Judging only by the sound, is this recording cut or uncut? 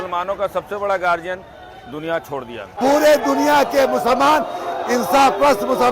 cut